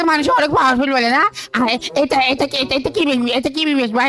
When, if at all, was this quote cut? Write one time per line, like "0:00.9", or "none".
none